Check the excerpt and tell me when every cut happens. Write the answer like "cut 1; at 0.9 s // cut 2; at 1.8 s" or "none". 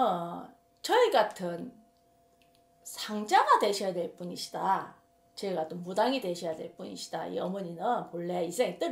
none